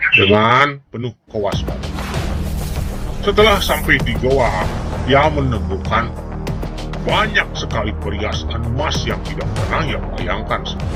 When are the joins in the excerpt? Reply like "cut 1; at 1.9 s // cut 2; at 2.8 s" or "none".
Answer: none